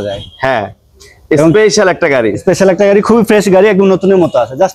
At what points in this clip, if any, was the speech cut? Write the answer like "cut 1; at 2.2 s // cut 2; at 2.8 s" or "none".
none